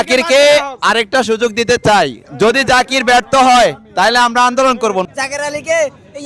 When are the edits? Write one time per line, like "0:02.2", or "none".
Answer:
0:02.2
0:05.1